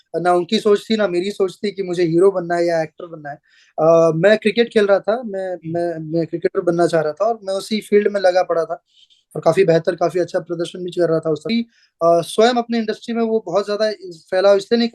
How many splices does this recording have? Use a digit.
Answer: 1